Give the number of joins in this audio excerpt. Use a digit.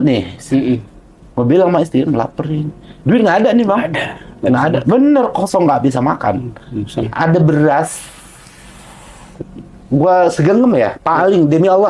1